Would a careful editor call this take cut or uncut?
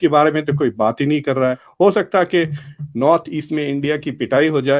cut